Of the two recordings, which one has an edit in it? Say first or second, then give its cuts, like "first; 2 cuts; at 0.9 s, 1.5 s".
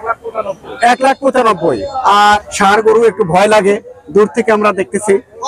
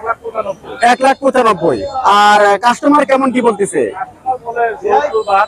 first; 1 cut; at 2.4 s